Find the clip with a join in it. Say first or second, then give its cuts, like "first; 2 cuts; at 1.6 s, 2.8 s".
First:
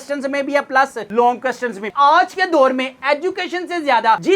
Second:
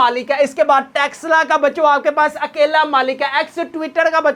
first; 1 cut; at 1.9 s